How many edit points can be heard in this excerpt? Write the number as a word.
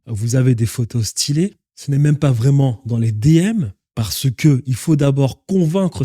one